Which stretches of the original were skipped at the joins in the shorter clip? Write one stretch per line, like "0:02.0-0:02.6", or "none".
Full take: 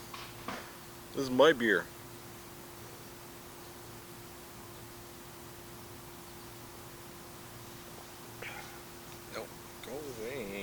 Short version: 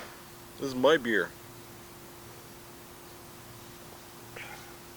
0:03.7-0:07.2